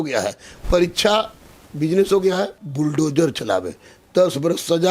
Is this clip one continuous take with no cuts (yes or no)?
no